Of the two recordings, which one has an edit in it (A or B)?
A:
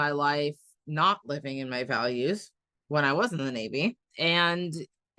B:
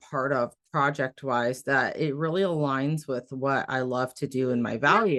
A